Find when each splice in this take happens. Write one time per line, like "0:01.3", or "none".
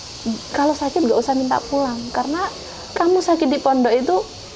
none